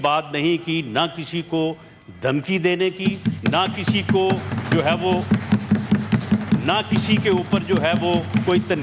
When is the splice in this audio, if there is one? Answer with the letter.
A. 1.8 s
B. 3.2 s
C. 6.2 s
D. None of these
D